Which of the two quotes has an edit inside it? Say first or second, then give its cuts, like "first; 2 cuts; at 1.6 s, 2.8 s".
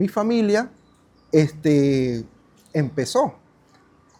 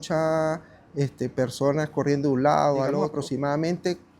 second; 1 cut; at 3.1 s